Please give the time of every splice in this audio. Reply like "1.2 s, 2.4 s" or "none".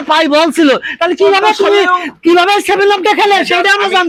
none